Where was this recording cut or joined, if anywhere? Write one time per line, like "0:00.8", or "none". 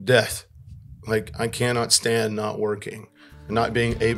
none